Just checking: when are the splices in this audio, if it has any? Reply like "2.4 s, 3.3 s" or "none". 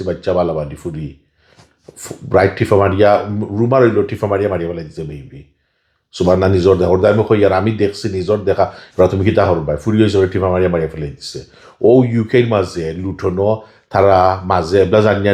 none